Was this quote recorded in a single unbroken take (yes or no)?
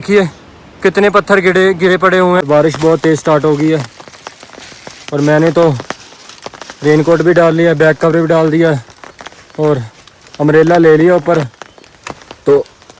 no